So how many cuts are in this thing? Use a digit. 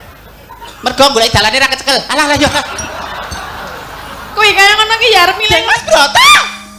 1